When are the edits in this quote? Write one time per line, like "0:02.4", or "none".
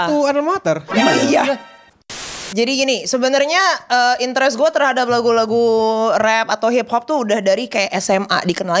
0:02.1